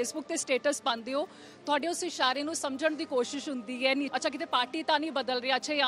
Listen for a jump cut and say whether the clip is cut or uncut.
cut